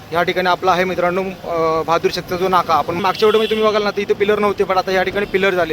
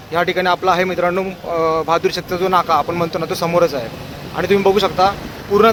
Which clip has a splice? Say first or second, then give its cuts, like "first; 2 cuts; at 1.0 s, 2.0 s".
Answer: first; 1 cut; at 3.0 s